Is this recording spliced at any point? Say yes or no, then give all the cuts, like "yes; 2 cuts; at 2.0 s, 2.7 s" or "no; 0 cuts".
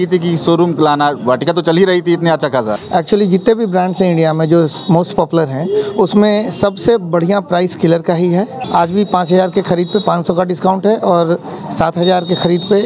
yes; 2 cuts; at 2.7 s, 8.6 s